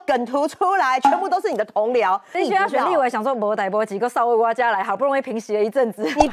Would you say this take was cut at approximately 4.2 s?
no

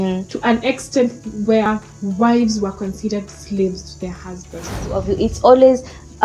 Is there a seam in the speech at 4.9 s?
yes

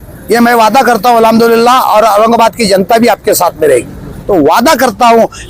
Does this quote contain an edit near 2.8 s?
no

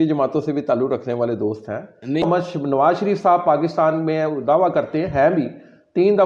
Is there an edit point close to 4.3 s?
no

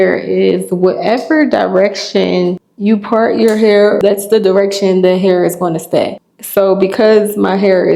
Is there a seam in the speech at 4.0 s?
yes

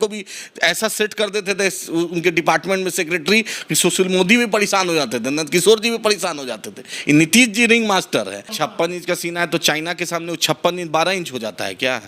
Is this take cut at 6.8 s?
no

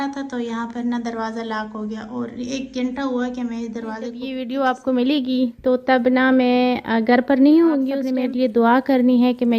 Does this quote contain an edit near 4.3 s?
yes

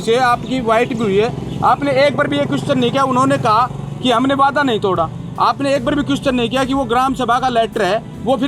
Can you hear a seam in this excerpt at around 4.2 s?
no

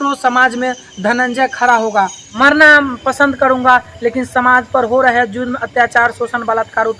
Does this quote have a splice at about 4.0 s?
no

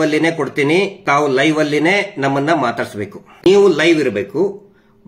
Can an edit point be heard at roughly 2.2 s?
no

